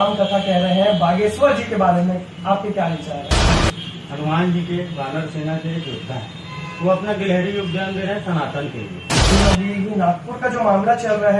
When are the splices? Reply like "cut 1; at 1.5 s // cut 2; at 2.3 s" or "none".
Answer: cut 1; at 3.5 s // cut 2; at 9.3 s

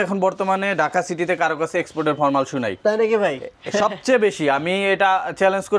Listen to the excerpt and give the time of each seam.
none

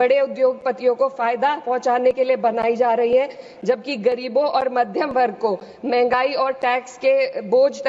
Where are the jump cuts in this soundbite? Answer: none

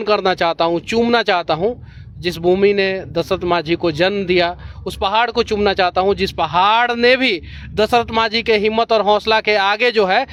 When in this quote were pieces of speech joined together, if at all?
none

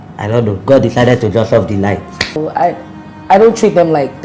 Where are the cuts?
cut 1; at 2.4 s

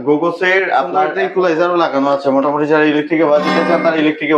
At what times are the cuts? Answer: cut 1; at 1.1 s

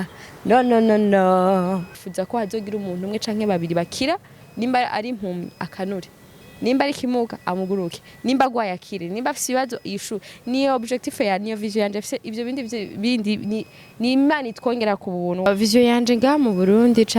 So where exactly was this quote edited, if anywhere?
cut 1; at 2.0 s // cut 2; at 15.4 s

